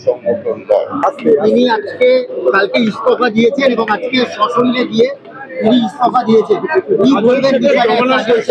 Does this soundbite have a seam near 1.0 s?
yes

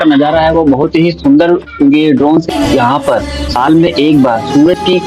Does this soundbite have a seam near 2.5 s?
yes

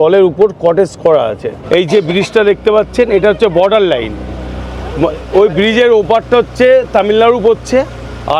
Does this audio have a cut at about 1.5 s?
yes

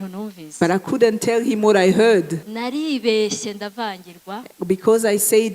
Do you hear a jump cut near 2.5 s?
yes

